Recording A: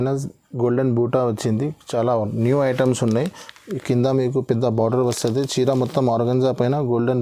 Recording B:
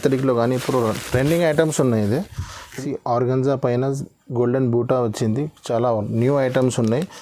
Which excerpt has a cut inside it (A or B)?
B